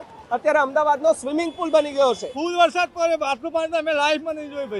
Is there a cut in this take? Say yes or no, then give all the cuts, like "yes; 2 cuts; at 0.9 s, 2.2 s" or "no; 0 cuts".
yes; 1 cut; at 2.3 s